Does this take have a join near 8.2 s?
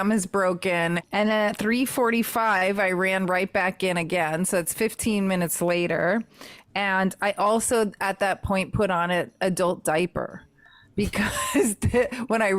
no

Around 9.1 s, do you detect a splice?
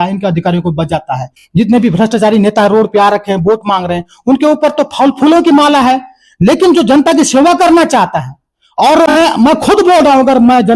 yes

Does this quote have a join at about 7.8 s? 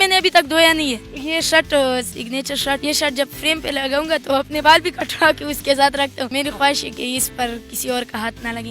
no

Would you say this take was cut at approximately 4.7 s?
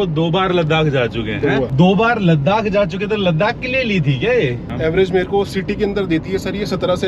yes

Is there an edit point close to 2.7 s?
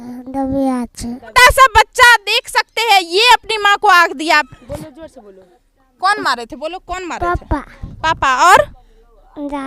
no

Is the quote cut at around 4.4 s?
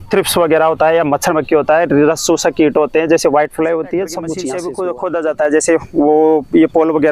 yes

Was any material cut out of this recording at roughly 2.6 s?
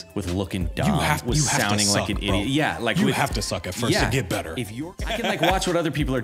no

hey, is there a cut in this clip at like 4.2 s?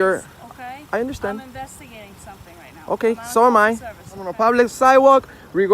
yes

